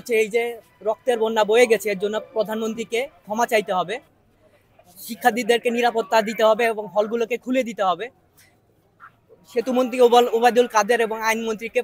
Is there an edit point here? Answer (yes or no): no